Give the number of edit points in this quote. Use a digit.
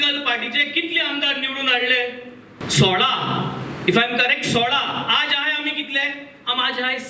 1